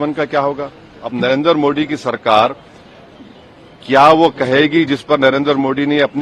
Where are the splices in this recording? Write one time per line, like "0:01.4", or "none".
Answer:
0:01.0